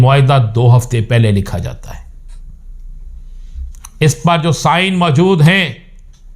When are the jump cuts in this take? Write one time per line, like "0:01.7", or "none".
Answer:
none